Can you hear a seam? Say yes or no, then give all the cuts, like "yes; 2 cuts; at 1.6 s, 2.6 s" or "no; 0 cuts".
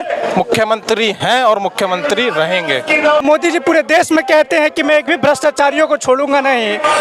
yes; 1 cut; at 3.2 s